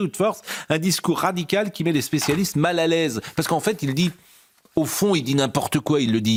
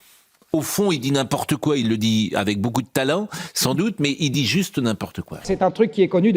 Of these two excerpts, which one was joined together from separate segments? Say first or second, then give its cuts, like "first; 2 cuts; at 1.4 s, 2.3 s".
second; 1 cut; at 5.5 s